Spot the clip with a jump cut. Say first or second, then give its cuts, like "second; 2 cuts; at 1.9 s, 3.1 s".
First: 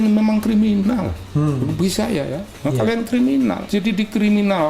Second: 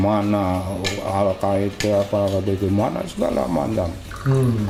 first; 1 cut; at 3.6 s